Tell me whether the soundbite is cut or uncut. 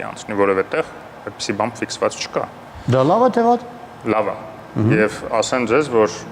uncut